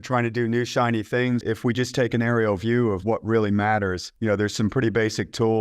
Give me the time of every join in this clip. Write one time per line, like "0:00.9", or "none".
0:01.4
0:04.1